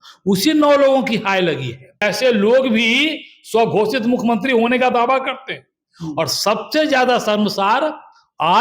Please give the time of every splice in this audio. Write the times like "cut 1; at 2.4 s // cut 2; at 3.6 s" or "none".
cut 1; at 2.0 s